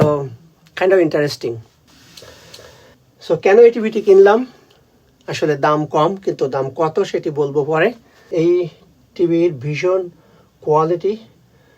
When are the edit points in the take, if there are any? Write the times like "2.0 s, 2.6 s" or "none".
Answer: 8.1 s